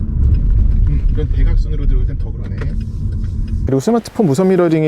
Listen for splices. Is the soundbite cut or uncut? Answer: cut